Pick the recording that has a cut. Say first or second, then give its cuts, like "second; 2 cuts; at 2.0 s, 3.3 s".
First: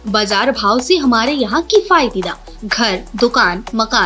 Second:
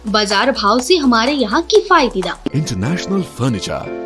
second; 1 cut; at 2.5 s